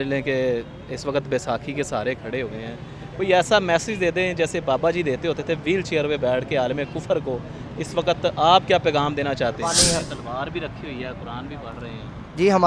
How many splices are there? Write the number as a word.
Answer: one